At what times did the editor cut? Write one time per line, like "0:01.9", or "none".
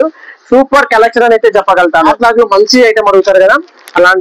0:02.1

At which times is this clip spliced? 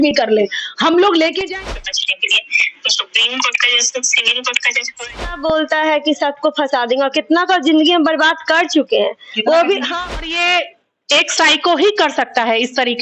0:01.4
0:05.4
0:10.2

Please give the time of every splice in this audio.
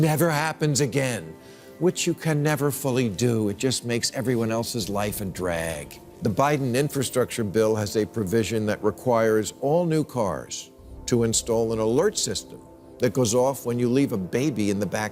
0:05.8

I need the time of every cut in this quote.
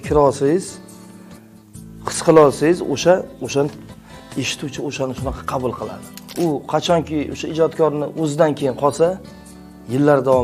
0:06.2

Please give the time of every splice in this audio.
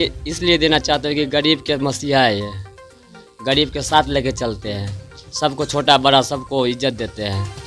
none

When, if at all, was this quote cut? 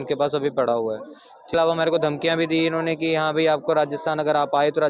0:01.5

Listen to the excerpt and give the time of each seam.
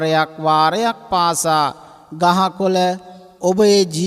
none

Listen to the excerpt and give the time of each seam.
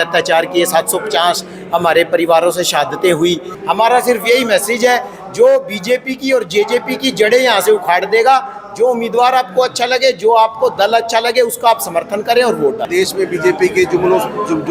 0:03.5
0:12.9

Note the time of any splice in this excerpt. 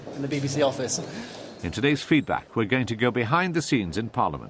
0:01.0

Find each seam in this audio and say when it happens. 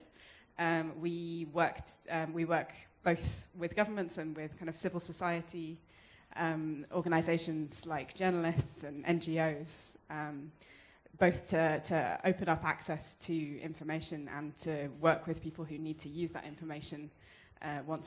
0:08.0

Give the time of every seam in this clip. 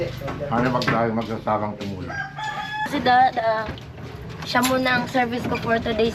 0:02.9

